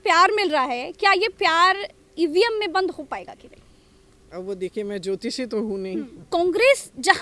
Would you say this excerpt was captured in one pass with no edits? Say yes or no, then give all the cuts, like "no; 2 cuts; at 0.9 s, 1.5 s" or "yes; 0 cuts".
no; 1 cut; at 6.2 s